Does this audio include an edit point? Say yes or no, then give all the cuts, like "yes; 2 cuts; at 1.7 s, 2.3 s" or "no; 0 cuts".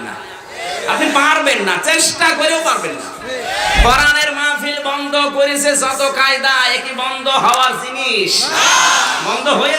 no; 0 cuts